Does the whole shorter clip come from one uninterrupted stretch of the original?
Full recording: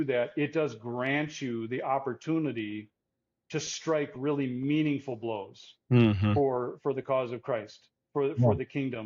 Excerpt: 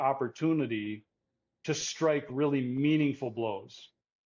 yes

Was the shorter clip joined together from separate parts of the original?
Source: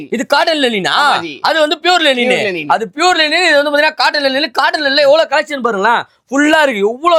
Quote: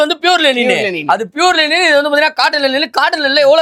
no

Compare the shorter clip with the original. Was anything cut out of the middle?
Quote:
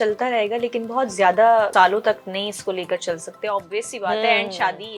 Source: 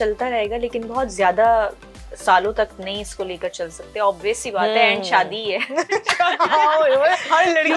yes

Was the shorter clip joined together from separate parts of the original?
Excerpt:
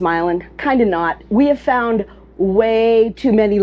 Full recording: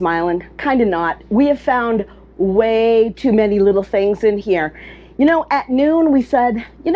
no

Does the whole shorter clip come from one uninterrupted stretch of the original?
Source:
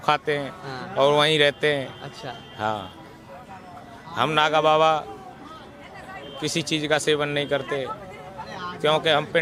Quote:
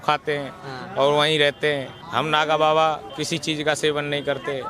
no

